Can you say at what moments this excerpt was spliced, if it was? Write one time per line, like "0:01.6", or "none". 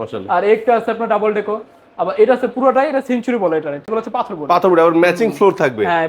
0:03.8